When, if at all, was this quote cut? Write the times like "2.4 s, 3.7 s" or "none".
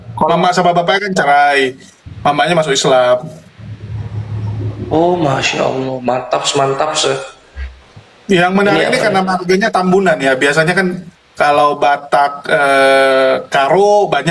none